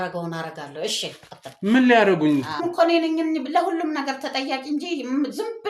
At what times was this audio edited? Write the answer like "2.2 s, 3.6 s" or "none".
2.6 s